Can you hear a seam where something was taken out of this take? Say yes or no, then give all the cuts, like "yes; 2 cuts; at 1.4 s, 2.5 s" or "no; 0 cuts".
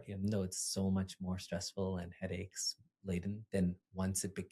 no; 0 cuts